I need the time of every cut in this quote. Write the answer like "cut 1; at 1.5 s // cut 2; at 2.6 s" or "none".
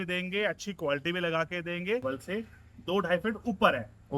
cut 1; at 2.0 s